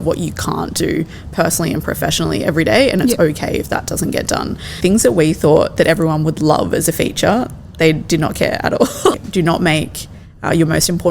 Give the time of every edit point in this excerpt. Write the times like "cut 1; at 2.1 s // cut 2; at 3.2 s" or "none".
cut 1; at 4.8 s // cut 2; at 9.1 s